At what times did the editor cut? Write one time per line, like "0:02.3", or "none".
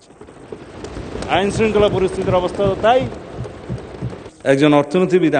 0:04.2

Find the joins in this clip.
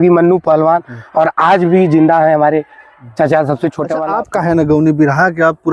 0:04.1

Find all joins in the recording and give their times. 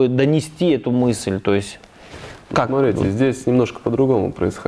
none

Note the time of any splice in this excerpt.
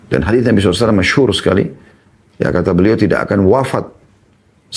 none

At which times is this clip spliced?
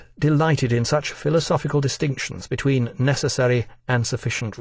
0:03.4

